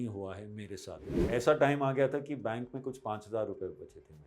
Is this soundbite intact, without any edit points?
no; 1 cut; at 1.2 s

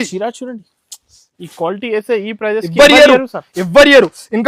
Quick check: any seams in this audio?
no; 0 cuts

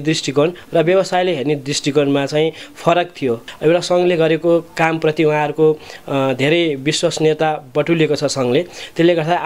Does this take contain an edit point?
yes; 1 cut; at 3.5 s

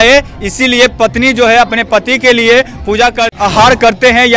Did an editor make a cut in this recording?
yes; 1 cut; at 3.3 s

